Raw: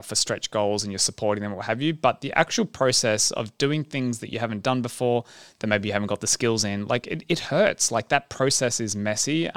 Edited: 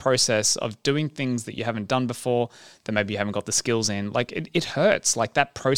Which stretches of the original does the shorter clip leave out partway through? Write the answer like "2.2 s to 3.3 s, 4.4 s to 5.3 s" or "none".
none